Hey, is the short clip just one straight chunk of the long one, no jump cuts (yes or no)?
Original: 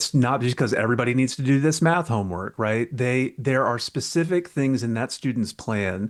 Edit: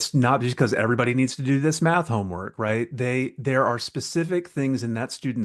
yes